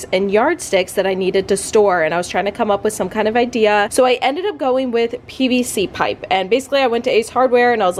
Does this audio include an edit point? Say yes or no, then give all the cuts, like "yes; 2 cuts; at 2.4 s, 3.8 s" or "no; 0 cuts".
no; 0 cuts